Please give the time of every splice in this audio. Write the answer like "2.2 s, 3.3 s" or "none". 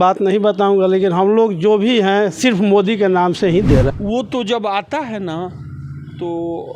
3.9 s

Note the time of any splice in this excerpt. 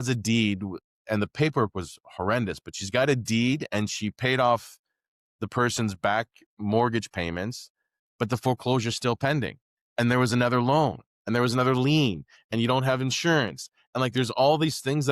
none

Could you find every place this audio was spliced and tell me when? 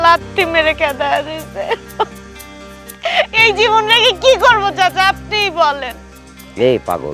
none

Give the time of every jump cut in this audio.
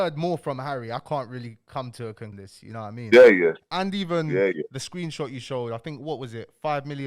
2.3 s

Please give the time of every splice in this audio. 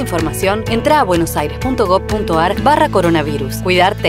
none

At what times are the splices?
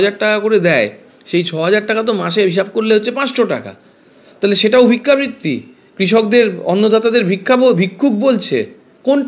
none

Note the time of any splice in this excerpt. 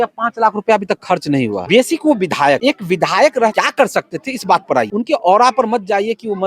1.6 s, 2.6 s, 3.5 s, 4.9 s

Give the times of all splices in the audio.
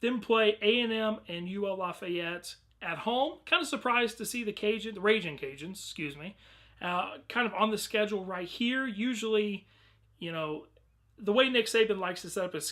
4.9 s

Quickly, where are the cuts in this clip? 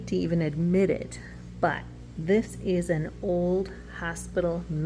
none

